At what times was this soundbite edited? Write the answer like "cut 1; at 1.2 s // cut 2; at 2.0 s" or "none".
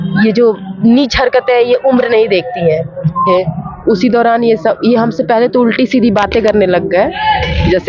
cut 1; at 3.3 s